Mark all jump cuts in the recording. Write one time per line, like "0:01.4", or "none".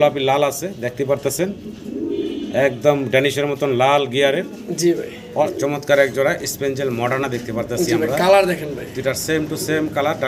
0:05.5